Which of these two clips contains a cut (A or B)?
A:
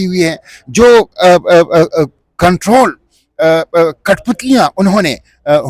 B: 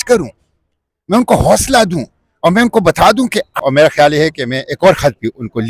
B